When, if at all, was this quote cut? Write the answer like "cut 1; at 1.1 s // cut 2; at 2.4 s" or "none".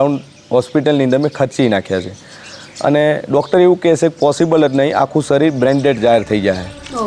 none